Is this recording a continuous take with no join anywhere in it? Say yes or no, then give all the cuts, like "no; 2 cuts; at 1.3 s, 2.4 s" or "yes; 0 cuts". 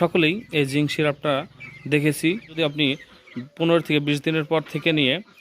no; 1 cut; at 2.6 s